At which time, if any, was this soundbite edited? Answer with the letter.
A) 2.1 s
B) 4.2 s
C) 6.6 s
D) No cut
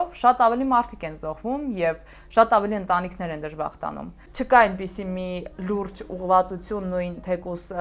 B